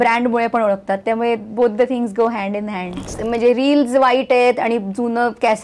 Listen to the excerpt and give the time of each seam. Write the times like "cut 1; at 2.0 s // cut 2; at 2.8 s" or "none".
cut 1; at 3.1 s